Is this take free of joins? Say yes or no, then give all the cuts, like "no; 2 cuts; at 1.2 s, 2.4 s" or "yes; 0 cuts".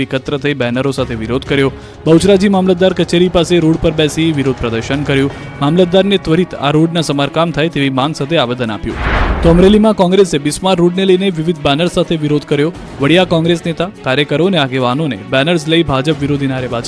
yes; 0 cuts